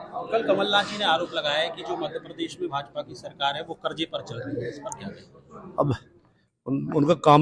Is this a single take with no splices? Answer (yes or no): yes